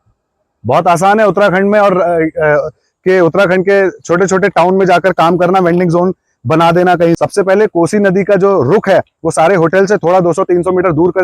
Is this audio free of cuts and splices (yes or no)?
no